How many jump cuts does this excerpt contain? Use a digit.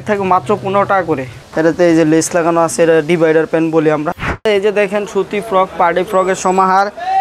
2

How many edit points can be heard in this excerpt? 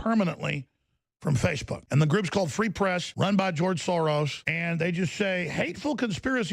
3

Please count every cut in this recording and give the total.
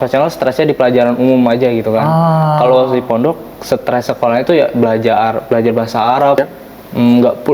1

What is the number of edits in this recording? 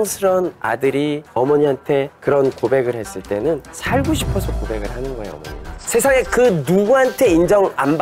0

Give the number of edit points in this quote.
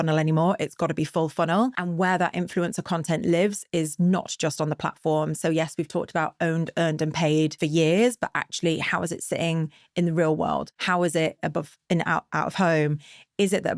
3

